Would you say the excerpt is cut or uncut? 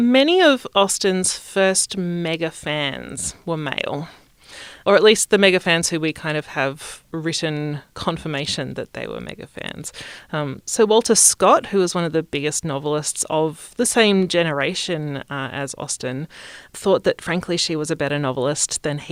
uncut